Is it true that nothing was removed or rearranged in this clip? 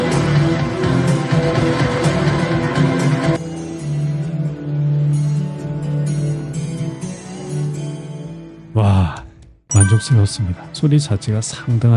no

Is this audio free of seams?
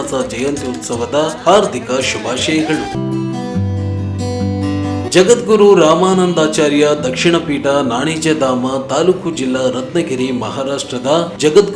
no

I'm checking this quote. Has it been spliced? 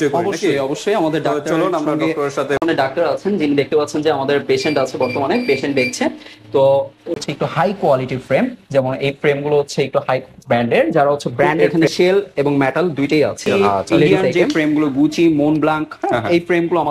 yes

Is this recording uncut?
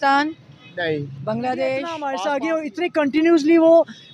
no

